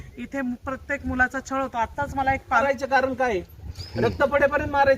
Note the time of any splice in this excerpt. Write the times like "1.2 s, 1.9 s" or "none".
2.6 s